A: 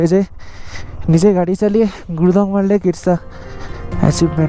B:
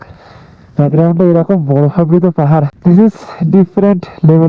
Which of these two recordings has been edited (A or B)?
B